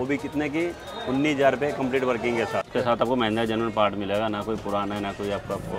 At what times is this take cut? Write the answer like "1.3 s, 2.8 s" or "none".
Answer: 2.7 s